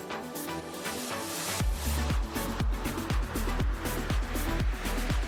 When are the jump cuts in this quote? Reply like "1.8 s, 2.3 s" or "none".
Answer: none